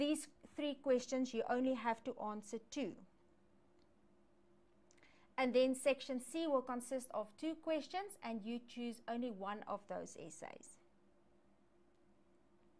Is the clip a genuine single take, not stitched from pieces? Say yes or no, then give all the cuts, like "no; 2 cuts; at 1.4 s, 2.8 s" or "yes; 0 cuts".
no; 1 cut; at 8.7 s